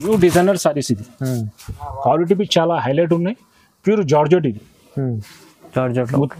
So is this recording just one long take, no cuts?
yes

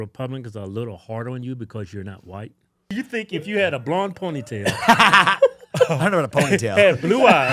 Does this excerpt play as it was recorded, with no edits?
no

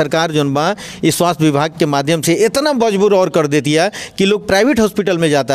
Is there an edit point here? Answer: no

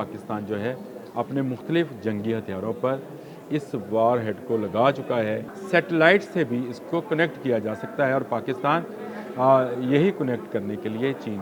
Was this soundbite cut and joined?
yes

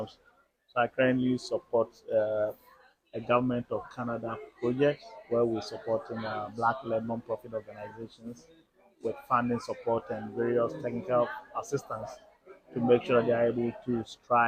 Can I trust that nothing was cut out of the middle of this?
yes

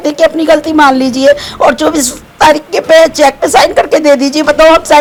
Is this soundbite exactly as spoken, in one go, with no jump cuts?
yes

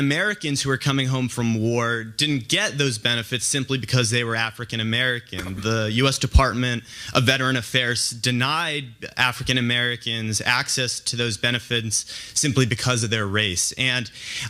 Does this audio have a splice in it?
yes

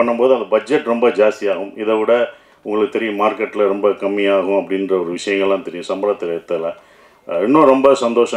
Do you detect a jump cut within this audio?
no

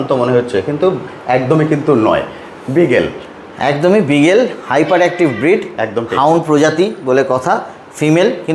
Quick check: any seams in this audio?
no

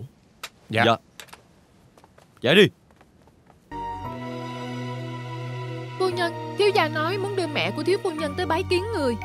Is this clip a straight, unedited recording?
no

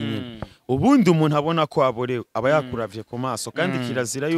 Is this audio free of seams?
yes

